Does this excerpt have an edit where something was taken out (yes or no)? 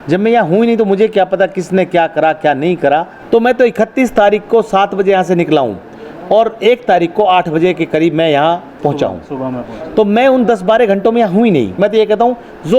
yes